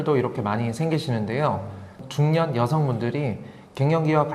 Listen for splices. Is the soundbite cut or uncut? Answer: cut